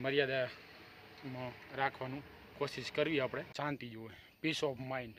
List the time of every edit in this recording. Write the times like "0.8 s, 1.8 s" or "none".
3.5 s